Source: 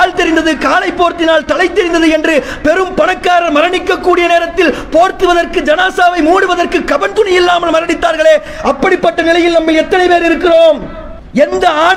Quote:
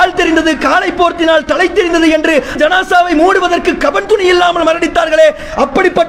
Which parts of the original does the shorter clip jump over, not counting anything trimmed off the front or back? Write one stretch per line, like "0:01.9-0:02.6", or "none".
0:02.5-0:05.6